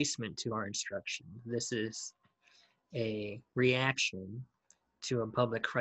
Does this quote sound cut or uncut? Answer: uncut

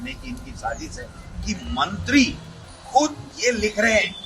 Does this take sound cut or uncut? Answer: cut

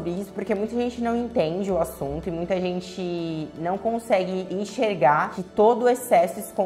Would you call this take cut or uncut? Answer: uncut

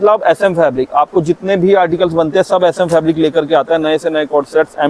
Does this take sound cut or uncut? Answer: uncut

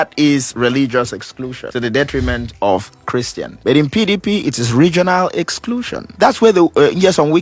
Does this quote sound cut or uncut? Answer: cut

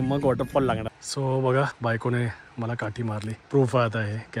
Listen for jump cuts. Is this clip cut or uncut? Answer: cut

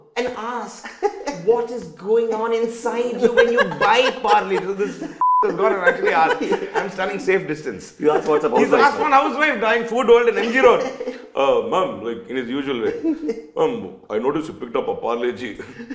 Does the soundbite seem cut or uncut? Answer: uncut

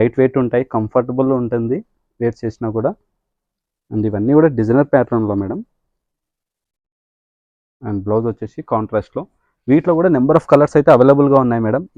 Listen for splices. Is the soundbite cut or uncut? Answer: uncut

